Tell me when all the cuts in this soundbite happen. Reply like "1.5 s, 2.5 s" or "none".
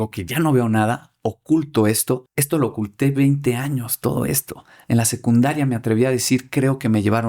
2.3 s